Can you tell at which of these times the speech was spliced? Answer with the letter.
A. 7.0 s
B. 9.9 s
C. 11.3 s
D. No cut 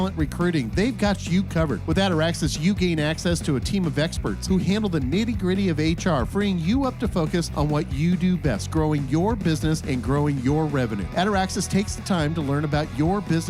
D